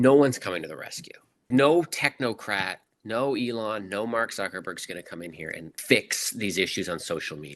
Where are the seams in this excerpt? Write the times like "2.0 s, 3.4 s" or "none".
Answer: 1.5 s, 5.7 s

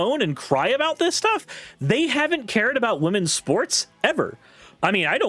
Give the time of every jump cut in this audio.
none

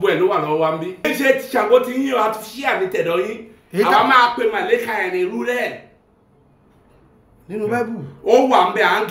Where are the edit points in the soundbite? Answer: 1.1 s

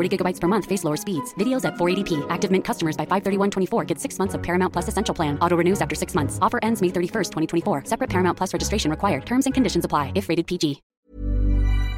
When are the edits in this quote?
10.9 s

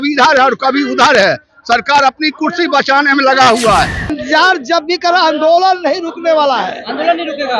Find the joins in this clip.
4.0 s

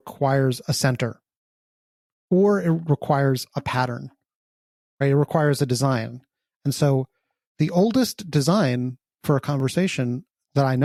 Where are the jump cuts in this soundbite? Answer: none

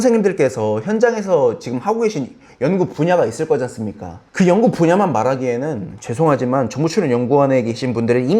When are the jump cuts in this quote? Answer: none

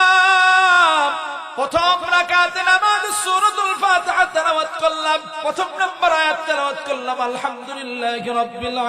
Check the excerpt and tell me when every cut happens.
1.4 s, 5.3 s

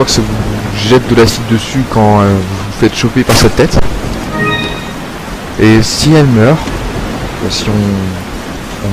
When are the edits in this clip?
3.1 s

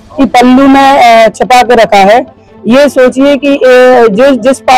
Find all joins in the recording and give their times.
none

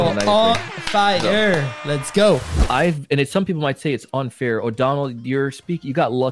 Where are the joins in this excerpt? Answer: 2.5 s

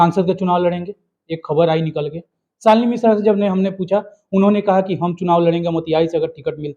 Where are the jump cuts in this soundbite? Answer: none

